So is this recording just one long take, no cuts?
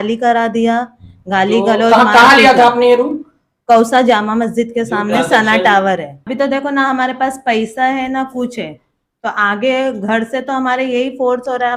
no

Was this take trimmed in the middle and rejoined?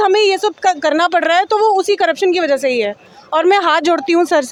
no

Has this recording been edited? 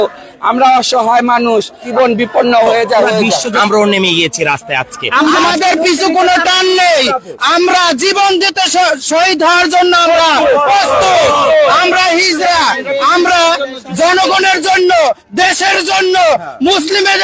yes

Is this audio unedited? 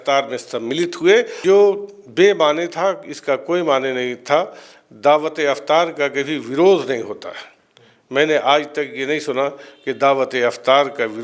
no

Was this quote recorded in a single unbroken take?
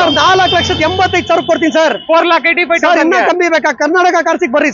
yes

